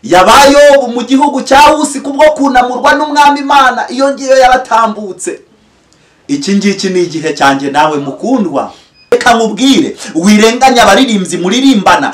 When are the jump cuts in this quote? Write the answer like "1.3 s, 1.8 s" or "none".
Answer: 9.1 s